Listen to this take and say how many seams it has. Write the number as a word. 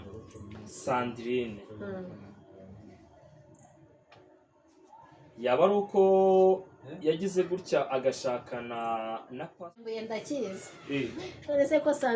one